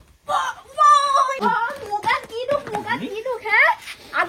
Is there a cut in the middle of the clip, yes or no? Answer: yes